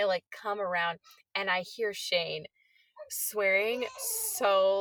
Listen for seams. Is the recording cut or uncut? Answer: uncut